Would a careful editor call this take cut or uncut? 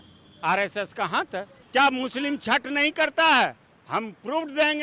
cut